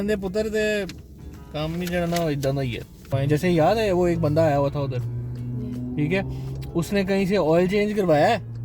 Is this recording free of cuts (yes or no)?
no